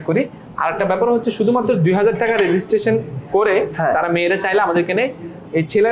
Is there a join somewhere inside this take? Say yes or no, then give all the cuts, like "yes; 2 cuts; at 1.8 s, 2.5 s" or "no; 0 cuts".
no; 0 cuts